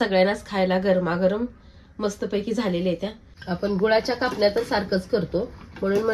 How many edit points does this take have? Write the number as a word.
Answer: one